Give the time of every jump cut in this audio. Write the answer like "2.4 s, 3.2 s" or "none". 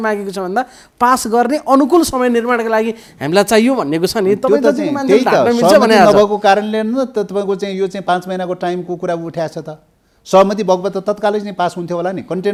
none